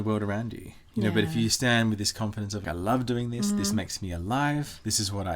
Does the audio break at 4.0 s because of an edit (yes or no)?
no